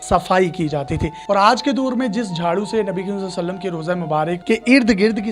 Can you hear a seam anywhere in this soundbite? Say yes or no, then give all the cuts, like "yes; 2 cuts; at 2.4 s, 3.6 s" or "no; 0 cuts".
yes; 2 cuts; at 1.2 s, 4.4 s